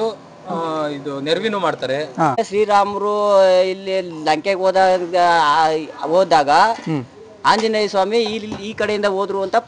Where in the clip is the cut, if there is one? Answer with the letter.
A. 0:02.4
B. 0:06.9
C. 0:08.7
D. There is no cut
A